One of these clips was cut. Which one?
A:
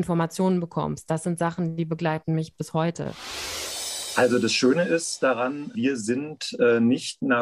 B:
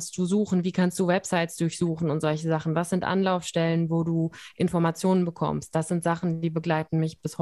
A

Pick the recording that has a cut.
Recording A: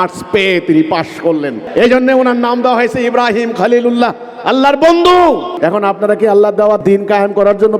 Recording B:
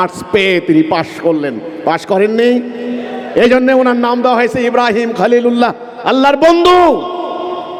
A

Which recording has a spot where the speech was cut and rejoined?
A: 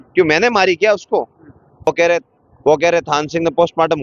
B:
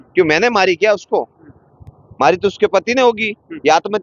A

